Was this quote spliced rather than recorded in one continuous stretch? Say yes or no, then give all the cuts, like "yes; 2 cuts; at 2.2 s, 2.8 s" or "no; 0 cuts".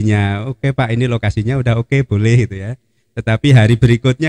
no; 0 cuts